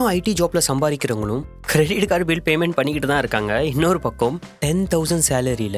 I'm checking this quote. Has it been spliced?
no; 0 cuts

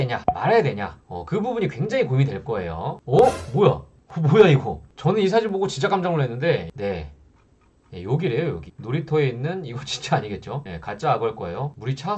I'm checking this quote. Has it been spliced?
no; 0 cuts

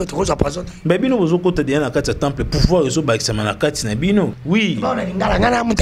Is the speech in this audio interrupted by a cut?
yes; 1 cut; at 4.4 s

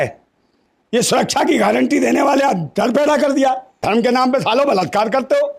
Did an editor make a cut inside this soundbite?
yes; 1 cut; at 3.8 s

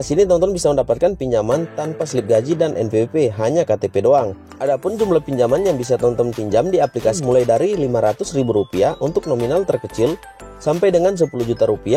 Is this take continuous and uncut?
no; 2 cuts; at 4.4 s, 7.2 s

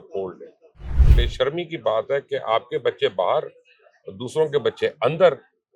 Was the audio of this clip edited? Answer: yes; 1 cut; at 1.0 s

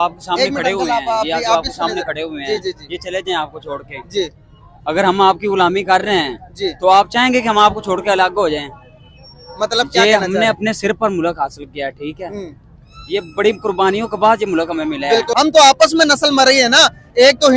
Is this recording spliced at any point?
yes; 1 cut; at 15.3 s

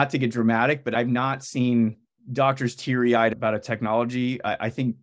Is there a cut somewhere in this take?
yes; 1 cut; at 0.9 s

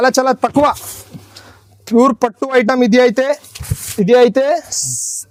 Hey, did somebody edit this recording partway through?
no; 0 cuts

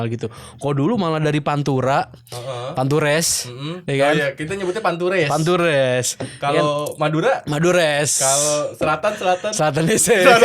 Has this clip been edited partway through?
no; 0 cuts

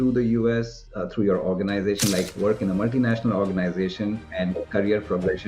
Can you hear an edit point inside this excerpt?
yes; 2 cuts; at 0.9 s, 4.3 s

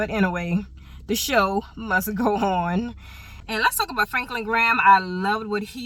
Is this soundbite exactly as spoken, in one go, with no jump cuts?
yes; 0 cuts

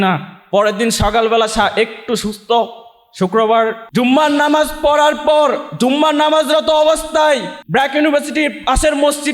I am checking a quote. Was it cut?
yes; 2 cuts; at 3.8 s, 7.6 s

